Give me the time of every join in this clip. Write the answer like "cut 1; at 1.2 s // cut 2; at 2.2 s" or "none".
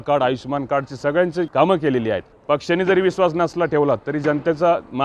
cut 1; at 1.5 s // cut 2; at 2.3 s